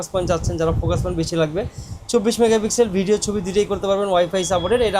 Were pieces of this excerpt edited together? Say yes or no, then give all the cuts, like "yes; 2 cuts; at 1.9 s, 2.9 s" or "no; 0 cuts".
no; 0 cuts